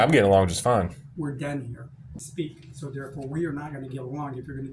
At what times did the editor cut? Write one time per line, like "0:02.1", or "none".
0:02.2